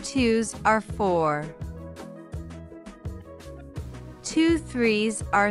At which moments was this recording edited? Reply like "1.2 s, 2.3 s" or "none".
1.5 s, 4.3 s